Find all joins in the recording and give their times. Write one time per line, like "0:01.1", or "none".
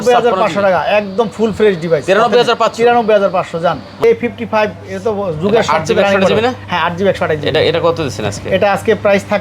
0:04.0